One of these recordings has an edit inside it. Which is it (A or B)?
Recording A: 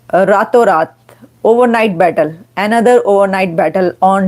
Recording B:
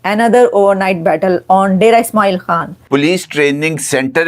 B